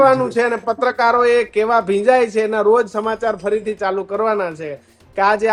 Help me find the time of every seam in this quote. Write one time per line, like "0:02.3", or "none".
none